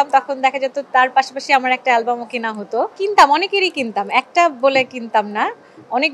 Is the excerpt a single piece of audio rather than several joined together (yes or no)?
yes